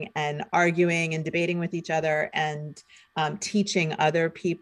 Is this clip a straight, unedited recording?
yes; 0 cuts

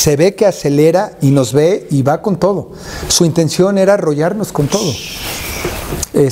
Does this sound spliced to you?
no; 0 cuts

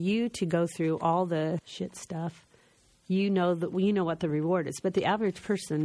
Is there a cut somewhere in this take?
yes; 1 cut; at 1.7 s

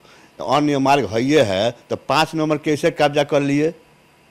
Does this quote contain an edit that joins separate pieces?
no; 0 cuts

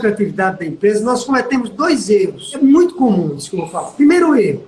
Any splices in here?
yes; 1 cut; at 2.4 s

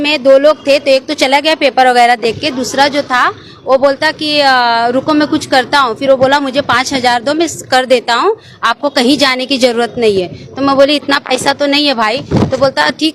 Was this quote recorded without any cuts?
yes; 0 cuts

